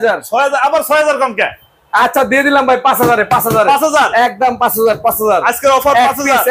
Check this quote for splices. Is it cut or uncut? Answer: uncut